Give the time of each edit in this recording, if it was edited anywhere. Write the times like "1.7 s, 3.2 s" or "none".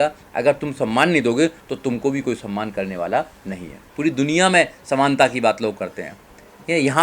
3.8 s